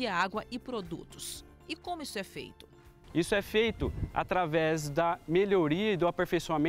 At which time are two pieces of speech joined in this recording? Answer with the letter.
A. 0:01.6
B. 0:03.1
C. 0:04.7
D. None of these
D